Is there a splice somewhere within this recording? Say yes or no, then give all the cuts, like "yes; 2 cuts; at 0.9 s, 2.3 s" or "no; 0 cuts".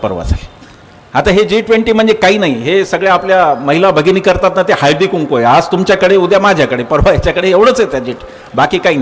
no; 0 cuts